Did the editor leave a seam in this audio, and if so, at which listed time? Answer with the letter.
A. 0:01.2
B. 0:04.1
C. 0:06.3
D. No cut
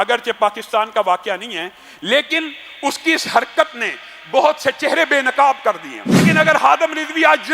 C